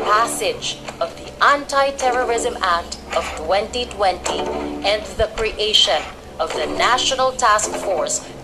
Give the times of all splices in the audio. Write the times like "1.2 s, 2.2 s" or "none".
none